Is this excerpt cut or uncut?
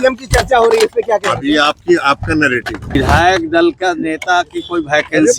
cut